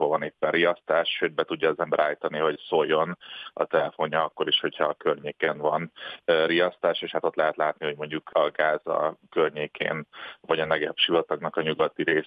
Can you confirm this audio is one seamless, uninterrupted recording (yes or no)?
no